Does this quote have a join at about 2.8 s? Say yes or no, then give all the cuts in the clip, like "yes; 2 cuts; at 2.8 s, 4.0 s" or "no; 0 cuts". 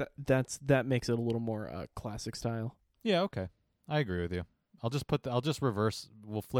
yes; 1 cut; at 2.8 s